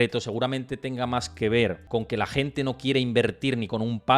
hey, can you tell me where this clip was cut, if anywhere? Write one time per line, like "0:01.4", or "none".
0:01.8